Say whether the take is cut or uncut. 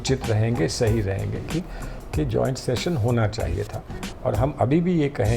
cut